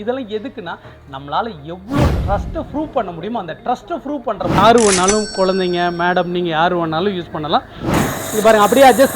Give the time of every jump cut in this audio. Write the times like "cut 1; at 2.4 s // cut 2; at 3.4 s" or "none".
cut 1; at 4.6 s // cut 2; at 7.8 s

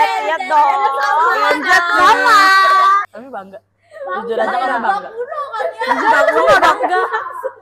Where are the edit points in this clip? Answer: cut 1; at 3.2 s

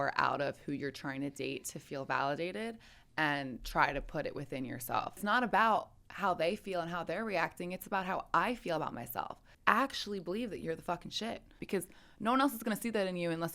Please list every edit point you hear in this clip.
cut 1; at 5.2 s // cut 2; at 9.4 s // cut 3; at 11.6 s

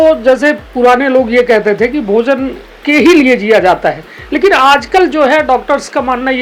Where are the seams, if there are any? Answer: none

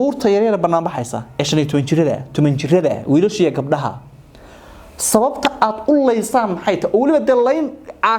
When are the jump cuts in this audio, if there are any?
none

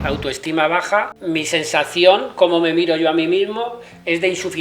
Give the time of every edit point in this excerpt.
cut 1; at 1.2 s

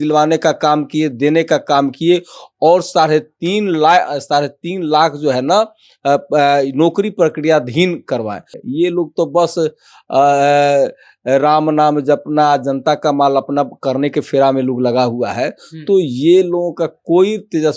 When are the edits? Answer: cut 1; at 8.6 s

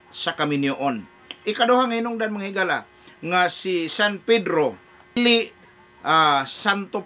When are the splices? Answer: none

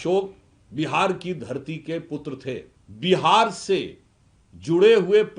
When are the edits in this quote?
cut 1; at 2.8 s

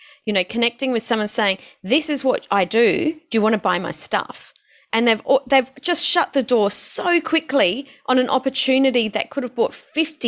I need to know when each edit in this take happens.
none

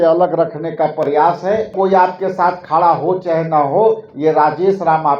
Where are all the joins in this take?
cut 1; at 1.7 s

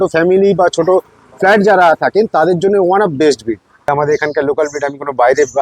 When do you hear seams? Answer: cut 1; at 3.9 s

